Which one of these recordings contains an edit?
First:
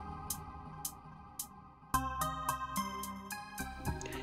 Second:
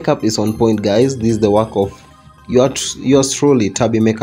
first; 1 cut; at 3.3 s

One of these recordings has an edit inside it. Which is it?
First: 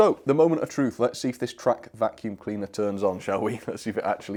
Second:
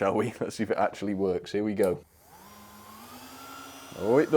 second; 1 cut; at 2.2 s

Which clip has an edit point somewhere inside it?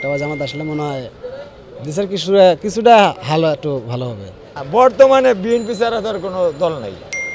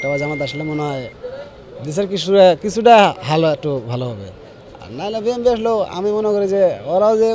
first; 1 cut; at 4.5 s

